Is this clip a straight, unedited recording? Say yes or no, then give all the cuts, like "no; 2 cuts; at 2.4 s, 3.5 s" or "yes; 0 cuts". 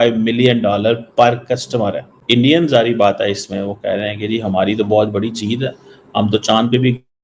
no; 1 cut; at 2.1 s